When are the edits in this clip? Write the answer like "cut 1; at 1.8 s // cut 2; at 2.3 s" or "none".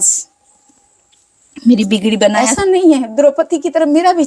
cut 1; at 2.4 s